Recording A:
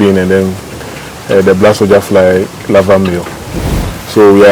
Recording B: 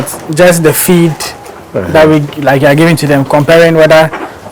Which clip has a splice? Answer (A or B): A